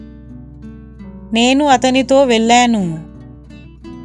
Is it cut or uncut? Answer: cut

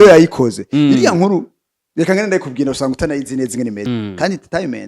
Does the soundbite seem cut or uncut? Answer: cut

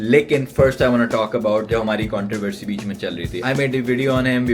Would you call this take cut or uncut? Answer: cut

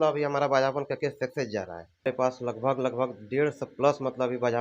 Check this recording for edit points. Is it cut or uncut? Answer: cut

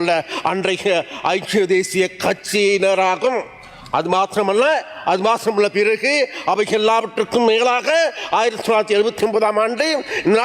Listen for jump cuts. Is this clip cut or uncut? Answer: uncut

